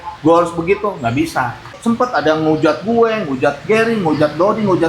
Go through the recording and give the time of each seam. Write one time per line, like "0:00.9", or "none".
0:01.7